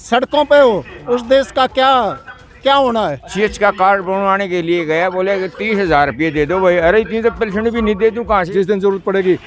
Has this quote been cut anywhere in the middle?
yes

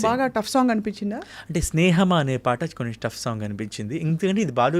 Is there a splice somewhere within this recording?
no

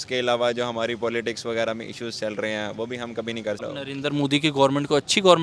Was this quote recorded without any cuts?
no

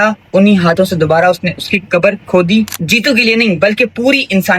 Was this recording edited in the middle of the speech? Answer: yes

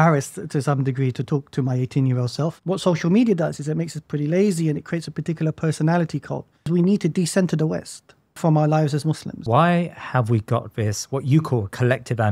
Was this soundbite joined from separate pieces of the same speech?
yes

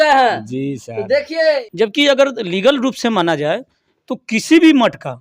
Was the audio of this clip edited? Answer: yes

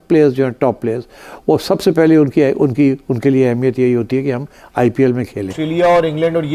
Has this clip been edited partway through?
yes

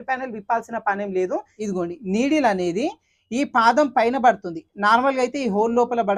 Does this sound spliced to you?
yes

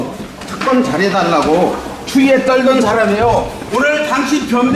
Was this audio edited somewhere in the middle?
no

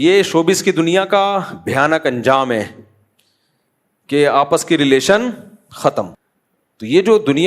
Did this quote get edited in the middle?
yes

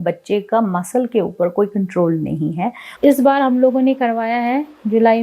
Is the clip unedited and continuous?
no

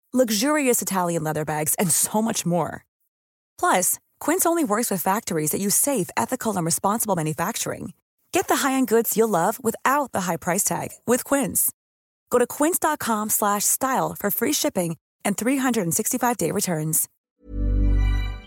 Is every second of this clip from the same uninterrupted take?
no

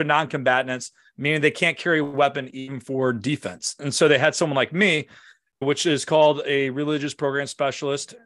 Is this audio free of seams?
yes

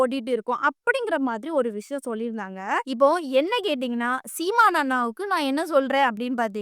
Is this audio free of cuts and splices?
no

